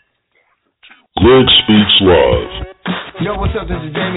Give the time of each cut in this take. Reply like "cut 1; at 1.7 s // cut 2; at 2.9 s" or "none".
cut 1; at 1.1 s